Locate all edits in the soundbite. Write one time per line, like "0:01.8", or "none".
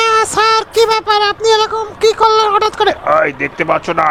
none

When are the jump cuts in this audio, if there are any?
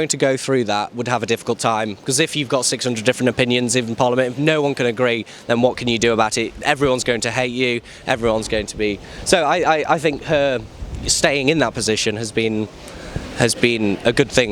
none

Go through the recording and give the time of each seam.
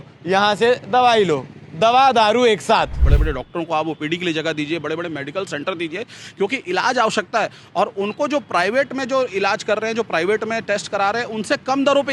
0:03.1

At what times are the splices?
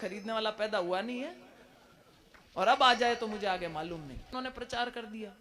0:04.3

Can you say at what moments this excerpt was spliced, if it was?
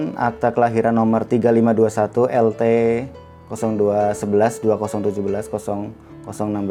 none

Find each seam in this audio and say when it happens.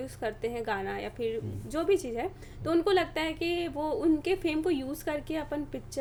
none

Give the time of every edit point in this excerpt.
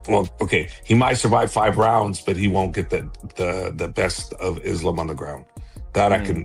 0:04.3

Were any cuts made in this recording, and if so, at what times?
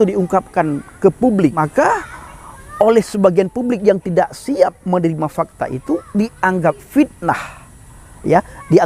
0:01.6

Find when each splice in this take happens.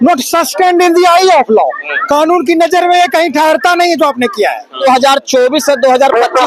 0:04.8

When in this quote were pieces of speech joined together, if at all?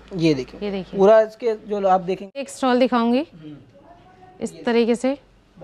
0:02.5

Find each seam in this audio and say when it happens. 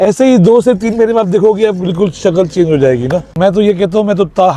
0:03.3

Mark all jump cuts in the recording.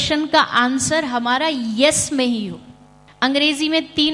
0:03.0

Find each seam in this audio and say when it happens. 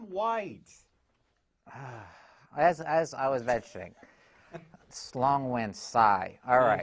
0:01.8

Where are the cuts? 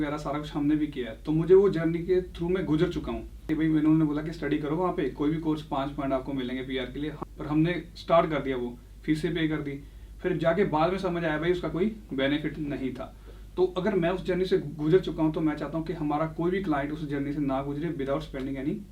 0:03.5
0:07.1

